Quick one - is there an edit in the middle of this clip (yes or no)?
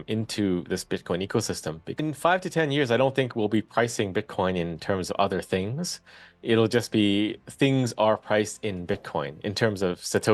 yes